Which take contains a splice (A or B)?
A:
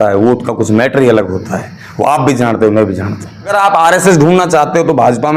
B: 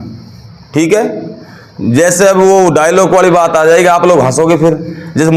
A